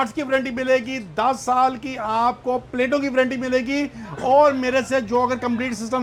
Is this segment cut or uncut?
uncut